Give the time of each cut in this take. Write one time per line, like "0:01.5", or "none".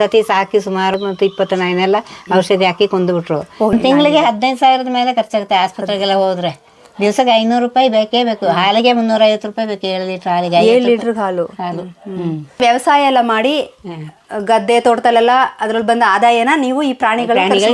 0:01.0
0:03.4
0:12.5